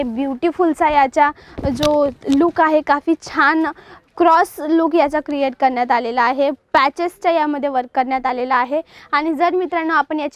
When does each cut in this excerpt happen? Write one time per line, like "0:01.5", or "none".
none